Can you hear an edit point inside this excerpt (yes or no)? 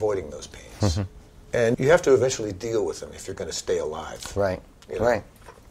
yes